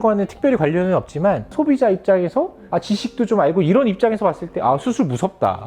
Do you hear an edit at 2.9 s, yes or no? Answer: no